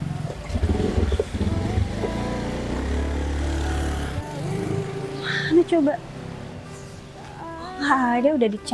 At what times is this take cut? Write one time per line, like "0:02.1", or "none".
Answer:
0:04.2